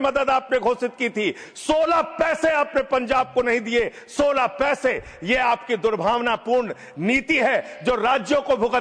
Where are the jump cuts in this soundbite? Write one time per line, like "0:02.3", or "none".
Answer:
none